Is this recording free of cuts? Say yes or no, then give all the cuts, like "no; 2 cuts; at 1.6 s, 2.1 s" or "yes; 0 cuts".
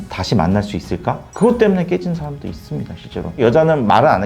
no; 1 cut; at 3.3 s